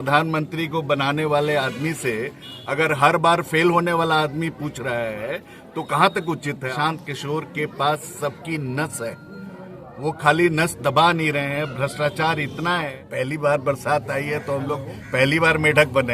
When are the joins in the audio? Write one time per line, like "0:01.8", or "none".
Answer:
0:06.2
0:12.9